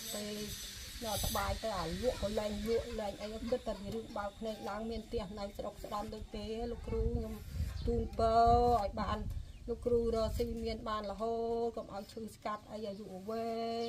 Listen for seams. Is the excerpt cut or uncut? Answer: uncut